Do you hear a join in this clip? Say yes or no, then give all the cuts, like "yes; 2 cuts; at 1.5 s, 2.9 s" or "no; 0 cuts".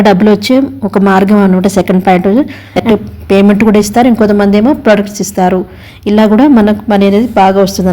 yes; 1 cut; at 2.6 s